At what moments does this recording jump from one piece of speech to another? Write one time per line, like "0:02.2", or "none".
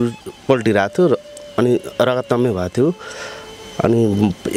none